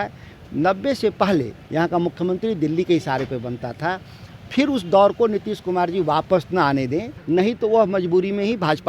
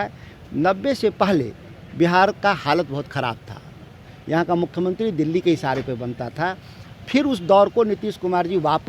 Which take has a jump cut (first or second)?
first